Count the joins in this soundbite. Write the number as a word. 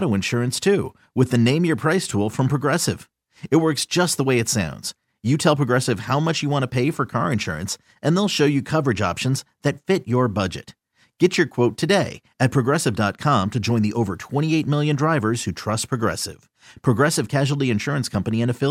zero